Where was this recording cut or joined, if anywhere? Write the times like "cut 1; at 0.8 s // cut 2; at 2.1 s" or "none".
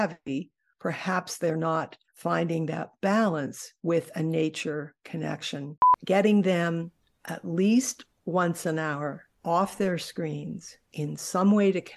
cut 1; at 5.9 s